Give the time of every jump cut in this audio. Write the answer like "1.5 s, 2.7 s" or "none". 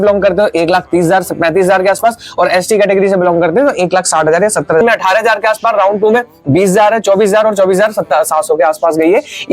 4.8 s